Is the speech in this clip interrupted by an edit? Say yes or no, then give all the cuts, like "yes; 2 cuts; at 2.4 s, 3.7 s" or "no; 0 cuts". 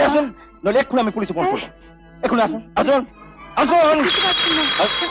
no; 0 cuts